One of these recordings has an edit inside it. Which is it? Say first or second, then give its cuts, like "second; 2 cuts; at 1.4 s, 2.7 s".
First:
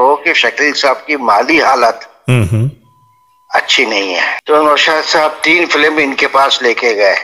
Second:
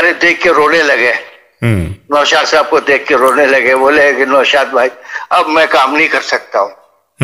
first; 1 cut; at 4.4 s